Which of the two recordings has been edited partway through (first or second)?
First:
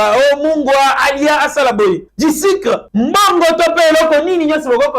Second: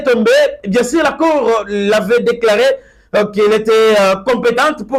first